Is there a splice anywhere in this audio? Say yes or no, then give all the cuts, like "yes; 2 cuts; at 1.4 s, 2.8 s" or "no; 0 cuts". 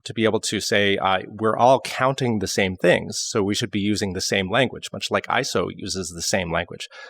no; 0 cuts